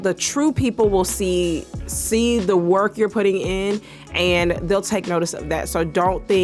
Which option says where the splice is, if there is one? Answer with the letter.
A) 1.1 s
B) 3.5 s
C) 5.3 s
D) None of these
D